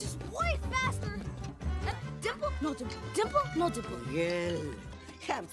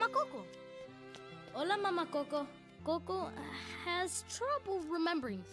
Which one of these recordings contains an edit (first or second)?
second